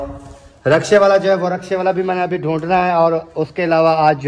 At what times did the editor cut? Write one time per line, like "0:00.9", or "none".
none